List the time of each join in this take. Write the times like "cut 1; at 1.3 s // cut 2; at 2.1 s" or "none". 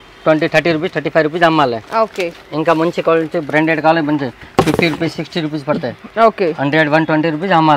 none